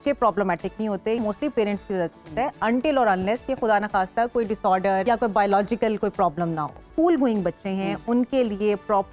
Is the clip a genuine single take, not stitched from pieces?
no; 3 cuts; at 1.2 s, 5.0 s, 6.9 s

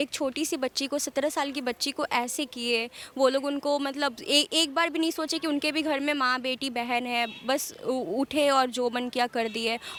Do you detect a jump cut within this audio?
no; 0 cuts

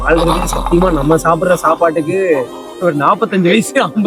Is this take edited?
no; 0 cuts

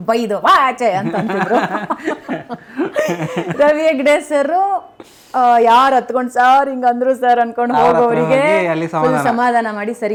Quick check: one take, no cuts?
yes; 0 cuts

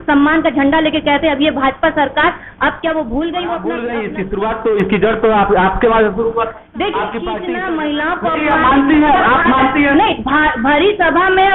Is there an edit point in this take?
yes; 2 cuts; at 3.8 s, 7.3 s

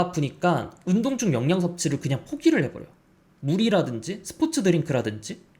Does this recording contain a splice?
no; 0 cuts

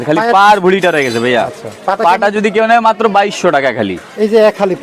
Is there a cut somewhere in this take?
no; 0 cuts

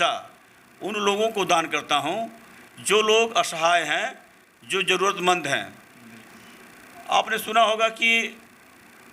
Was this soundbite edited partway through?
no; 0 cuts

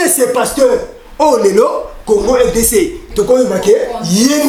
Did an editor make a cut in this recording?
no; 0 cuts

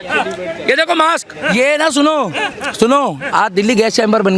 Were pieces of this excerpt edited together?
yes; 1 cut; at 1.5 s

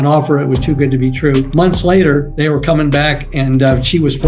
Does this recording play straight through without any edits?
no; 1 cut; at 1.5 s

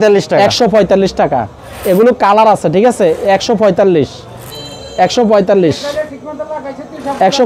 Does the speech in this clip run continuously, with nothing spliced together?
yes; 0 cuts

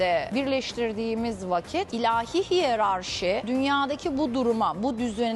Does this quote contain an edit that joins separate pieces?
no; 0 cuts

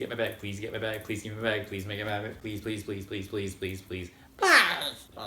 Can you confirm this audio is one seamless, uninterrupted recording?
no; 1 cut; at 4.2 s

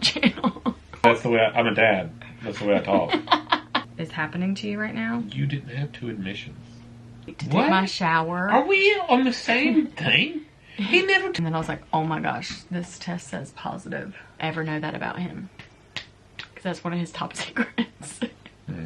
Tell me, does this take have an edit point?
yes; 5 cuts; at 1.0 s, 3.9 s, 7.4 s, 11.4 s, 14.4 s

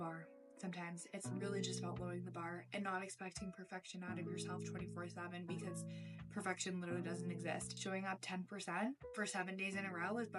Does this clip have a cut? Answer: yes; 1 cut; at 9.1 s

